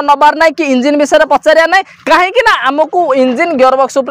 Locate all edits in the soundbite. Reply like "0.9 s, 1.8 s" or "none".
none